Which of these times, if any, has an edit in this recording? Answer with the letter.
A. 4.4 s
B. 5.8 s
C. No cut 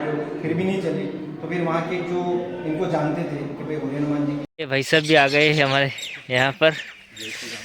A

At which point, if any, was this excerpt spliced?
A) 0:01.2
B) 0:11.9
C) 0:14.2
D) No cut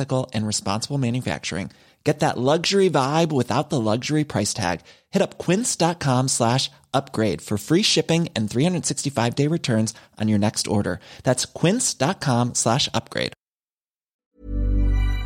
C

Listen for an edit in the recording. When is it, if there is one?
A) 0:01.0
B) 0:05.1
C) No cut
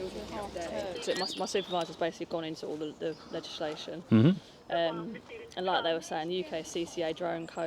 A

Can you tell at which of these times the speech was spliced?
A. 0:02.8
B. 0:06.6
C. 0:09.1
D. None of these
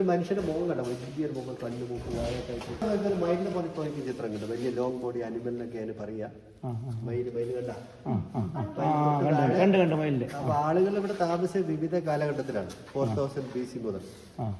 A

